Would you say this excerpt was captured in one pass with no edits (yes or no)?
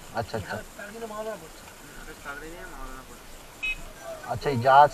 no